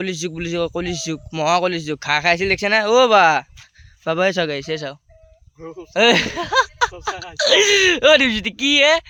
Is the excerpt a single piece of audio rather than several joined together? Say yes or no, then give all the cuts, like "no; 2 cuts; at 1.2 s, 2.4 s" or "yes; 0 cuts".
yes; 0 cuts